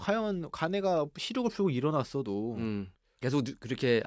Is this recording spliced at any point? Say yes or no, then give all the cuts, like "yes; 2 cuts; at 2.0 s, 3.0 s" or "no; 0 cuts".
yes; 1 cut; at 3.0 s